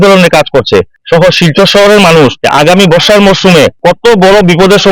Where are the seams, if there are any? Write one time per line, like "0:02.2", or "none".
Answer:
0:01.0
0:02.4
0:03.8